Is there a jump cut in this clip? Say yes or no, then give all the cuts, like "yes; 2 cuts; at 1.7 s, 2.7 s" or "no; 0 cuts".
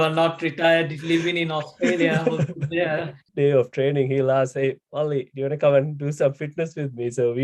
yes; 1 cut; at 3.2 s